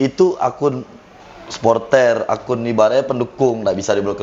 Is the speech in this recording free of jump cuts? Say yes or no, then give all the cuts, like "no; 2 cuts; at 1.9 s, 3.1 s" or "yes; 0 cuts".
yes; 0 cuts